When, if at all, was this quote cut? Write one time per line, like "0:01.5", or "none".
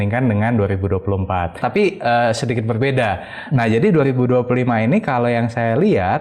0:01.6